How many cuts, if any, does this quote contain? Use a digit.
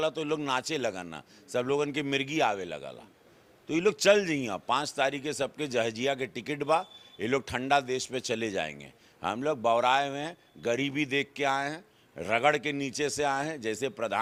0